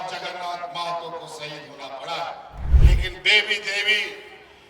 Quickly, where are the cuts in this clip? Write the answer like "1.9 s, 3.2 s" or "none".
2.7 s